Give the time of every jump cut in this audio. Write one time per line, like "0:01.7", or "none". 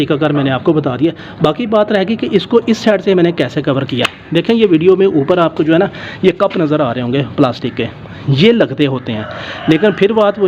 none